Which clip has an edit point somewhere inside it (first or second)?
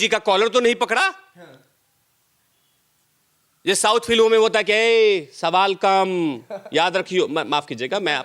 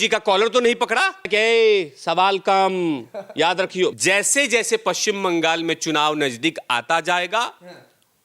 second